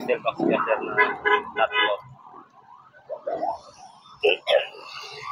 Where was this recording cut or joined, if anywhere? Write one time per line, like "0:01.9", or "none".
none